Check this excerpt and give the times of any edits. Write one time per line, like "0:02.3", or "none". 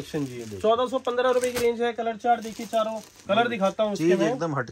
0:03.1